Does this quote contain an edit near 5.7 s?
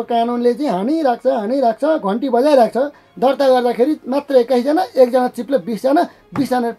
no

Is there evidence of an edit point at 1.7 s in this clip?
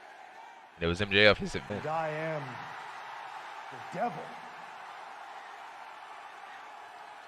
yes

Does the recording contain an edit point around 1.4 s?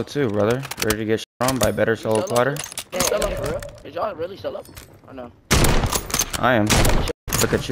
no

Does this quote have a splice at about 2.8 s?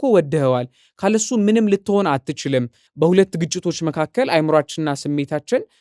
yes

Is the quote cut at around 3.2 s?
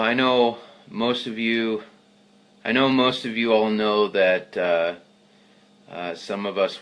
yes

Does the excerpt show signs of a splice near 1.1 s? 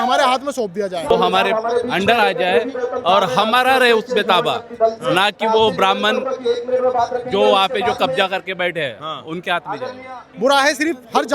yes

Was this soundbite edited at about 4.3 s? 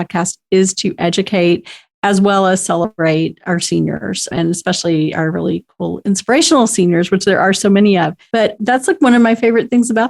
yes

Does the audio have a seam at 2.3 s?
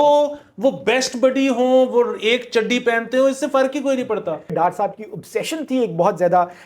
no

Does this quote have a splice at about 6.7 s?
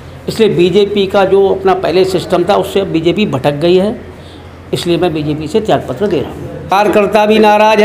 yes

